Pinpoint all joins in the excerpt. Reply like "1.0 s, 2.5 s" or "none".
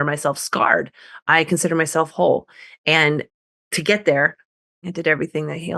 4.8 s

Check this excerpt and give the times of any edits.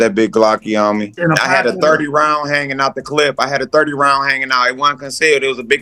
1.1 s

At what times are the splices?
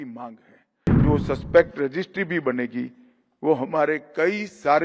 1.0 s

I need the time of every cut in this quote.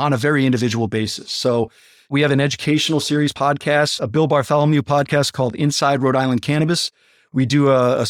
2.1 s, 3.4 s

